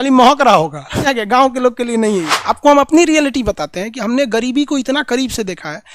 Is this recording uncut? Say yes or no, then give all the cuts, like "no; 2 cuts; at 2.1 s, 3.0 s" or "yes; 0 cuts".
no; 2 cuts; at 1.1 s, 2.3 s